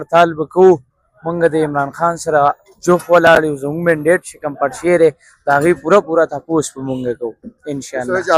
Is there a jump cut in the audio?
no; 0 cuts

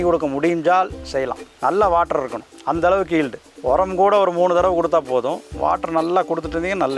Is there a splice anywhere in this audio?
no; 0 cuts

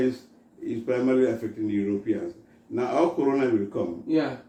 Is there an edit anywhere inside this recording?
no; 0 cuts

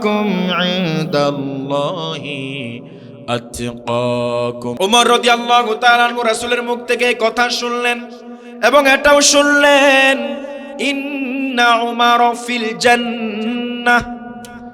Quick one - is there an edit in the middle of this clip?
yes; 1 cut; at 4.7 s

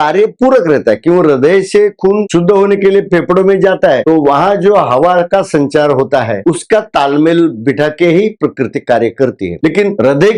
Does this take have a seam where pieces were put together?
no; 0 cuts

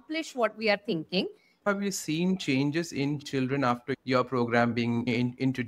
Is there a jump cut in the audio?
yes; 1 cut; at 1.7 s

